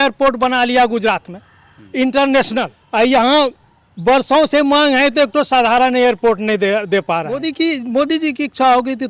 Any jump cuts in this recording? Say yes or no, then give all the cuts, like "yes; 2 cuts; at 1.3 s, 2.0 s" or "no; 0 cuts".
yes; 2 cuts; at 2.8 s, 7.4 s